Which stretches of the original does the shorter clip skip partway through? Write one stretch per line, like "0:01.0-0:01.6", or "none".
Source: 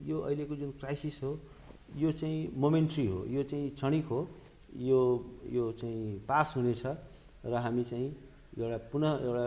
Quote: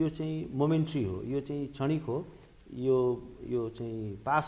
none